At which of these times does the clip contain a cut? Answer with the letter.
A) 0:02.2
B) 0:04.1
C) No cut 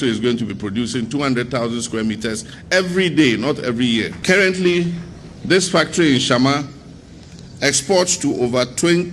B